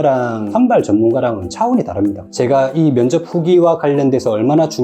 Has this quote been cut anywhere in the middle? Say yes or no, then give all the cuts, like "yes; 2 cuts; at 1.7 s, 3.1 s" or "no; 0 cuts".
yes; 1 cut; at 2.2 s